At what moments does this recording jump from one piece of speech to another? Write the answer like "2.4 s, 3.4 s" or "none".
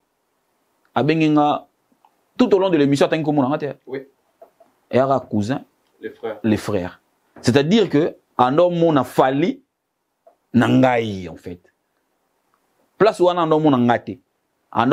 none